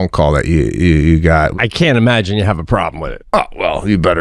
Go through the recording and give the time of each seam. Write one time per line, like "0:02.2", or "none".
0:01.5
0:03.1